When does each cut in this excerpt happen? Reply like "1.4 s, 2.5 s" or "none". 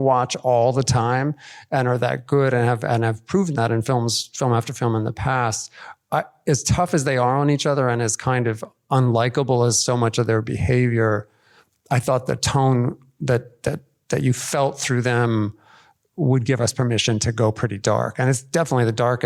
none